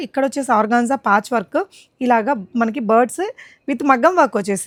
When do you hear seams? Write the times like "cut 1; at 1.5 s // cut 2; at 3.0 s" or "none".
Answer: none